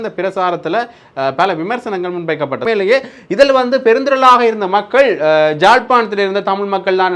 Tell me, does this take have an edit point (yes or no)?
yes